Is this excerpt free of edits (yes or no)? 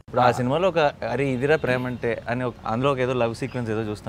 yes